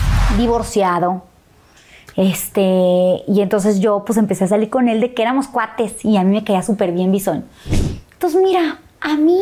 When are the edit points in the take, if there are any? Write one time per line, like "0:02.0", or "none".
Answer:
0:07.7

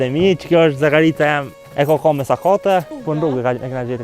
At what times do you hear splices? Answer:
0:01.6
0:02.9

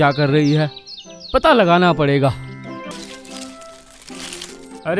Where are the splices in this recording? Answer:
0:02.9

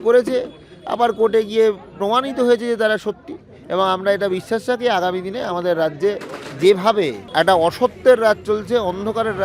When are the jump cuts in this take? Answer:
0:07.2

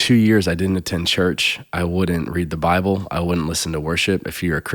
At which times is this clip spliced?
none

